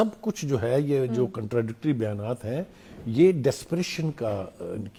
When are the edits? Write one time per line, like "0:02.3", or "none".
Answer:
none